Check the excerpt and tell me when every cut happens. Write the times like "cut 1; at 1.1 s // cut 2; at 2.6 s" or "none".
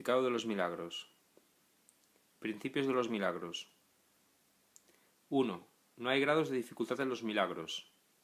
cut 1; at 4.7 s

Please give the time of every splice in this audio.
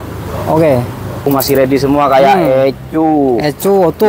cut 1; at 1.3 s

